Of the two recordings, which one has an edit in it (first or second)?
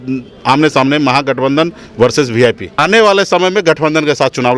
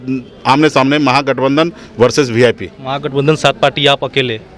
first